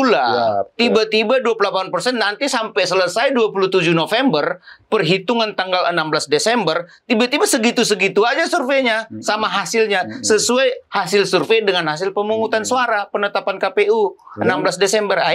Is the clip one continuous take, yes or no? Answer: yes